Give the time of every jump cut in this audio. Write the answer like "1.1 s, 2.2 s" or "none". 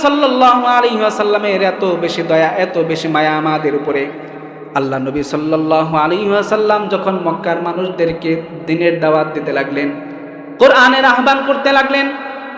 none